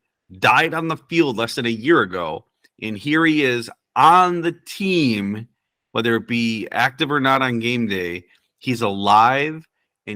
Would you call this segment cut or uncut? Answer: uncut